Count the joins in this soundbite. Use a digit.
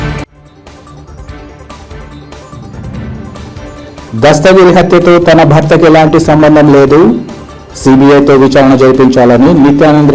1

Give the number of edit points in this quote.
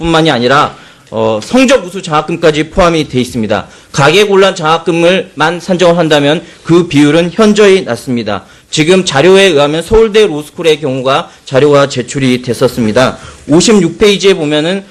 0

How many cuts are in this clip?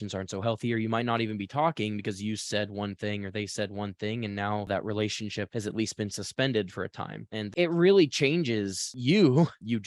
1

